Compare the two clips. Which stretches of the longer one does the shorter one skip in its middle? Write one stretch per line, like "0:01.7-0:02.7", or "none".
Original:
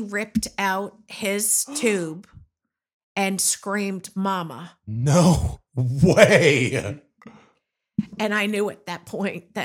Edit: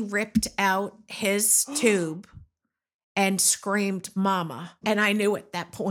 0:04.8-0:08.1